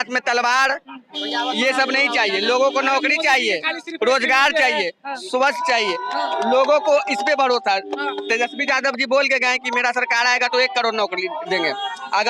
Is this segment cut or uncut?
uncut